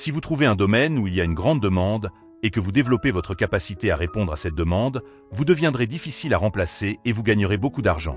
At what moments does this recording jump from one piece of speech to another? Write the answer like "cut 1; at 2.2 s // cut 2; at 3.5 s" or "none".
none